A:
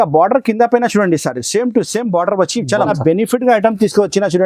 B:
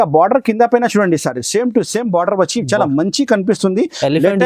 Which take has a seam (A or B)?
A